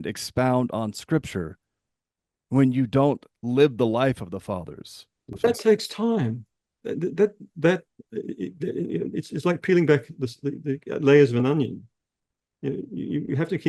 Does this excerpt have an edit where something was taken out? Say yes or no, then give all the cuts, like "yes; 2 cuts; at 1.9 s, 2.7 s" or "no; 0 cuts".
yes; 1 cut; at 5.4 s